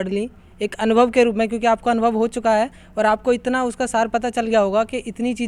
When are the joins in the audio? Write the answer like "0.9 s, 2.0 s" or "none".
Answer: none